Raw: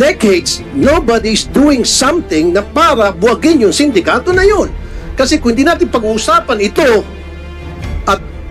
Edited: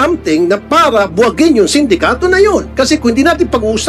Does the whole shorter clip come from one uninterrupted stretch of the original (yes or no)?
no